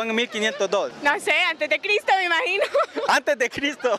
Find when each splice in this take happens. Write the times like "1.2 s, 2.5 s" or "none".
2.8 s